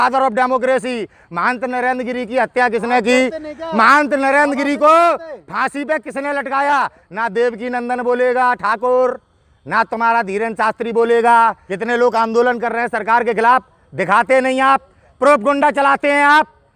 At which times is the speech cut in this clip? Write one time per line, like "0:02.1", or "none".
0:11.7